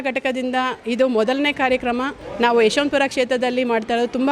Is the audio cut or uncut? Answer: cut